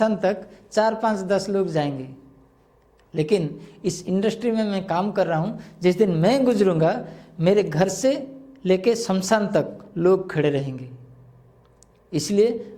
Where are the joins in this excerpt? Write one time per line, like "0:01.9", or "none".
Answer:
none